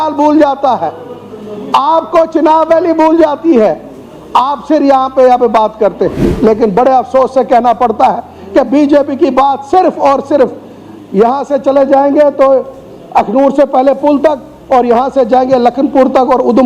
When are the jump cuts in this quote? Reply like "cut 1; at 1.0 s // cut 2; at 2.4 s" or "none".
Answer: cut 1; at 6.2 s